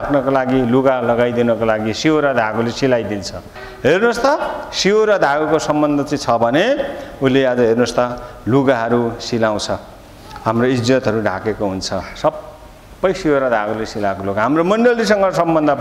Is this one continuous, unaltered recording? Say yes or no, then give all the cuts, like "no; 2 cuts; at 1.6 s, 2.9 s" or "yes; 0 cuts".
no; 1 cut; at 3.6 s